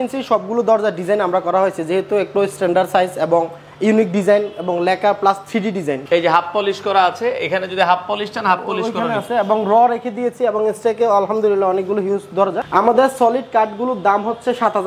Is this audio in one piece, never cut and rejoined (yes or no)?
no